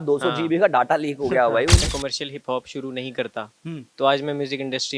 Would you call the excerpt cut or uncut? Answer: cut